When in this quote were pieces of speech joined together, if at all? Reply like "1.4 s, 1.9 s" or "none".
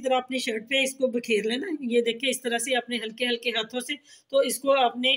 none